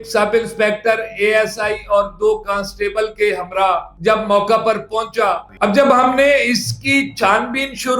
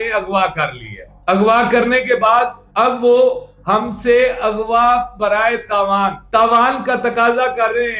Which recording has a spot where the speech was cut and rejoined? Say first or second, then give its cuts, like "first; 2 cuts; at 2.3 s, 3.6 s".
first; 1 cut; at 5.5 s